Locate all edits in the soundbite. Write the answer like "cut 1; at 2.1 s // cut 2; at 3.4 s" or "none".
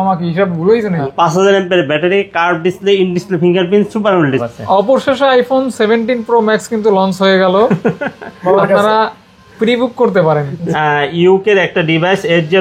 cut 1; at 1.0 s // cut 2; at 4.4 s // cut 3; at 10.6 s